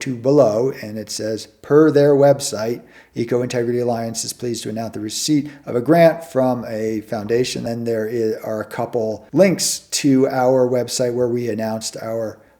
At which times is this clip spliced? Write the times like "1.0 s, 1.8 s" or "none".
7.6 s, 9.2 s

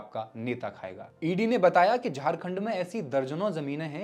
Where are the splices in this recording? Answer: 1.2 s

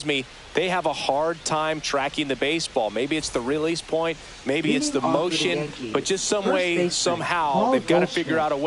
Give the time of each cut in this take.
none

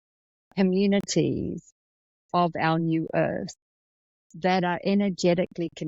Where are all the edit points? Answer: none

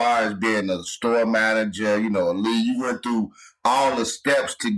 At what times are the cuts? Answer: none

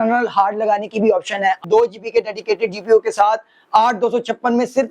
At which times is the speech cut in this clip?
1.6 s

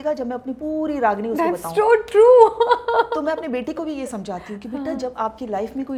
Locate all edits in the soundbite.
none

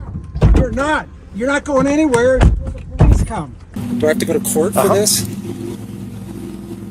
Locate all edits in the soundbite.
3.7 s

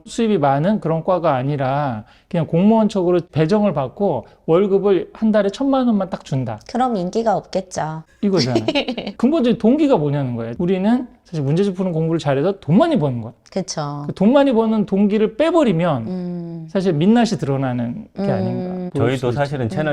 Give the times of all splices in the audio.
10.5 s

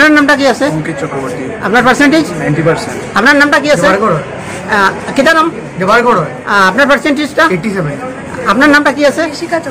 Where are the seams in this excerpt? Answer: none

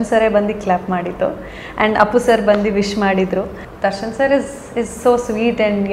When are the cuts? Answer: 3.6 s

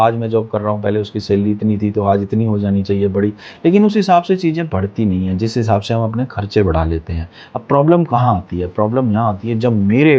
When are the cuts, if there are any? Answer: none

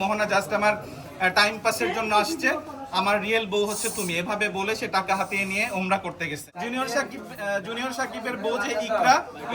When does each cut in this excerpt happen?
6.5 s

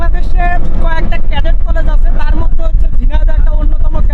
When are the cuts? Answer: none

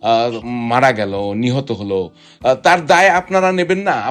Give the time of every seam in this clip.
none

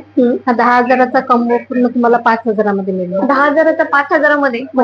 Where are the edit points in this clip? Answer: none

